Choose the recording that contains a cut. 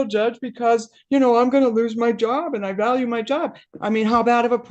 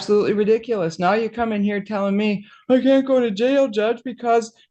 first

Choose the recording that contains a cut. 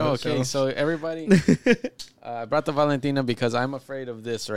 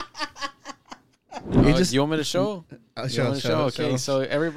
second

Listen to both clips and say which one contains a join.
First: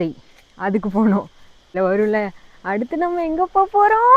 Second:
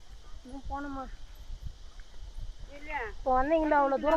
first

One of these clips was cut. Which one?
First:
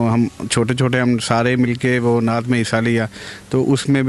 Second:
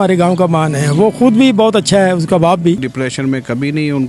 second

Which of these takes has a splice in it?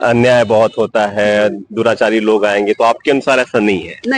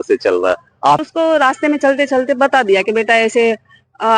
second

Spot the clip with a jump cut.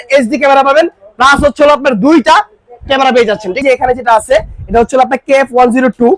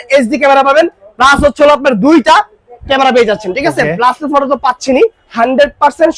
first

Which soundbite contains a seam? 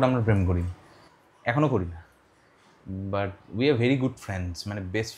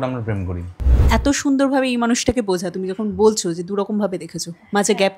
second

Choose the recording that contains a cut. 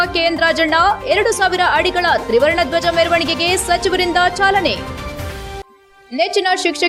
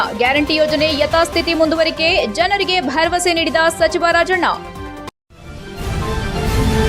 second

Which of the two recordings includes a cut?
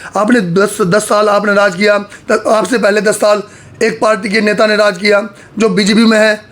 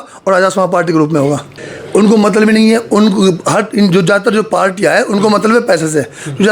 second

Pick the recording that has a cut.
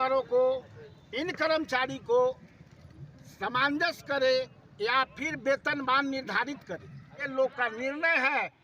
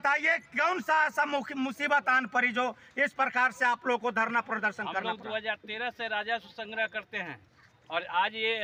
first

